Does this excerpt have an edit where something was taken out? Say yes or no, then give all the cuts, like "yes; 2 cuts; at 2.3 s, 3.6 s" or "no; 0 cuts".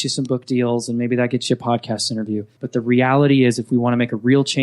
yes; 1 cut; at 2.6 s